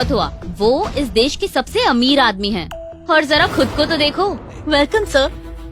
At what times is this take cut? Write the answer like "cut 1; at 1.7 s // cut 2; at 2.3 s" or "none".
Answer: cut 1; at 4.5 s